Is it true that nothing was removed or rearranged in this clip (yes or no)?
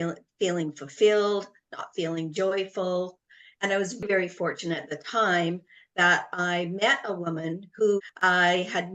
no